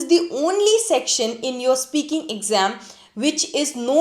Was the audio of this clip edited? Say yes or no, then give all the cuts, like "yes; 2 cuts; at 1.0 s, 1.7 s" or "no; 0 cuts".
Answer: no; 0 cuts